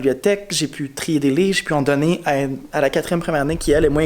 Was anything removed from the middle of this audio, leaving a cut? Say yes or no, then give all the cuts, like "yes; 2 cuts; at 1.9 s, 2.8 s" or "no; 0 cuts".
no; 0 cuts